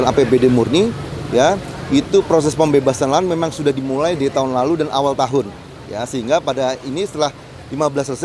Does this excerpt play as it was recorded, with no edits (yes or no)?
yes